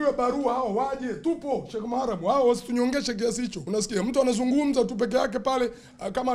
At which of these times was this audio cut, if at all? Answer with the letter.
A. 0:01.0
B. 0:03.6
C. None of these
B